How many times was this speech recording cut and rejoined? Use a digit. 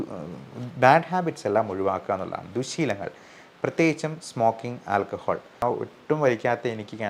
1